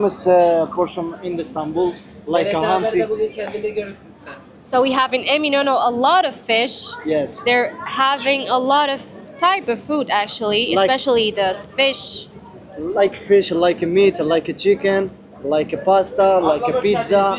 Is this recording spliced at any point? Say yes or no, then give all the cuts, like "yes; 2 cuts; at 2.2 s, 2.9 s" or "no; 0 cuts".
no; 0 cuts